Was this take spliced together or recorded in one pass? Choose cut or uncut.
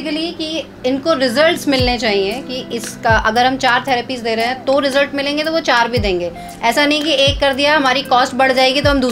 uncut